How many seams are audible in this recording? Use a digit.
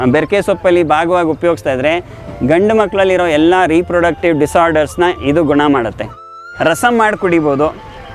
1